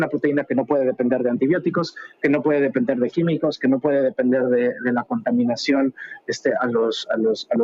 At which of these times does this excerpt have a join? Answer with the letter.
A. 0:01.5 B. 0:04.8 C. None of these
B